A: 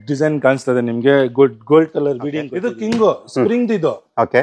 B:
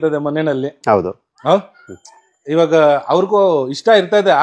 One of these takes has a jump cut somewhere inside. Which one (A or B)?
A